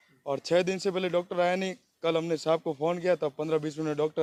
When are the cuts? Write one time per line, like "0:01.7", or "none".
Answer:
none